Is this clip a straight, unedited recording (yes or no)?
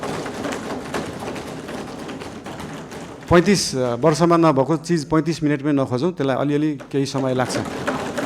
no